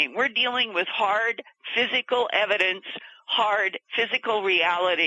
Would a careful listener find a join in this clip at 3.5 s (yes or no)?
no